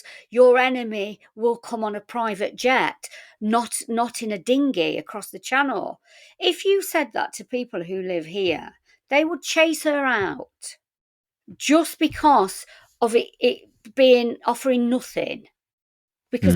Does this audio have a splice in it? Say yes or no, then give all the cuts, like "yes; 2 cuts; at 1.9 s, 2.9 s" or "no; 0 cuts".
no; 0 cuts